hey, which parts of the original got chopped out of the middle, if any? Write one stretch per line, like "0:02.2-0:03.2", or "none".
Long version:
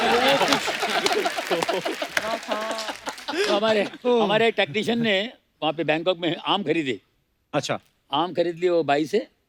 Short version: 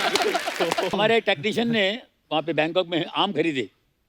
0:01.8-0:04.2